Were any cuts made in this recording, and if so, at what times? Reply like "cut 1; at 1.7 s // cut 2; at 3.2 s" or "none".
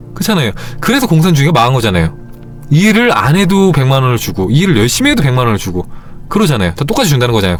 none